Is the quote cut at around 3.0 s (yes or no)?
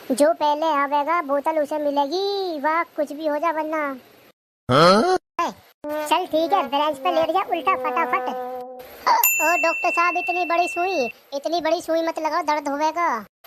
no